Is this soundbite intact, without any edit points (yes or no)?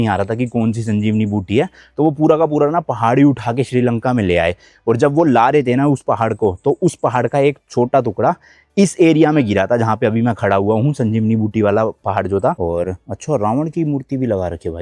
no